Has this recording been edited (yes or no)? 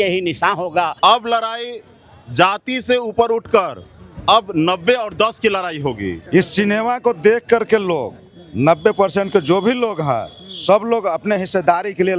yes